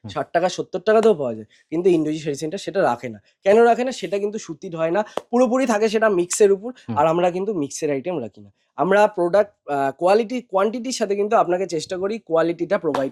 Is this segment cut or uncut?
uncut